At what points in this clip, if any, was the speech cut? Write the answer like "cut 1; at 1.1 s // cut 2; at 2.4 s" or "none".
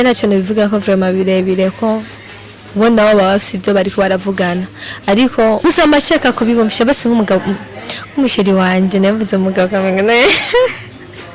cut 1; at 5.6 s